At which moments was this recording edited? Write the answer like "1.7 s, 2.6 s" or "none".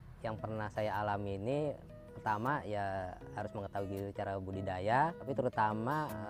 5.2 s